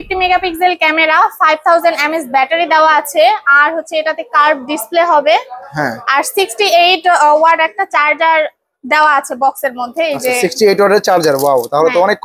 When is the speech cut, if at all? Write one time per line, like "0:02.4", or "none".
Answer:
none